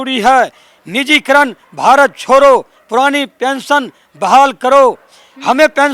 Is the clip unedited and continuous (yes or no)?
yes